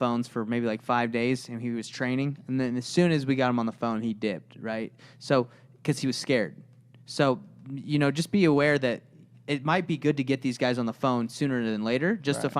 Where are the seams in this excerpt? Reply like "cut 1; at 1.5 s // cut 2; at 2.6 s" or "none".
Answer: none